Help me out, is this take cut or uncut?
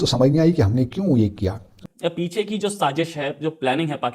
cut